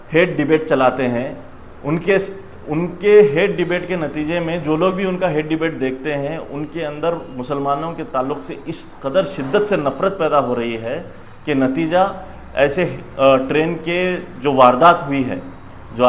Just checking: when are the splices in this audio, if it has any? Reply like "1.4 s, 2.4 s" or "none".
none